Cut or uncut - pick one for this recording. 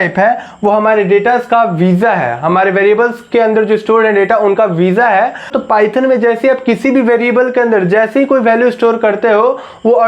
cut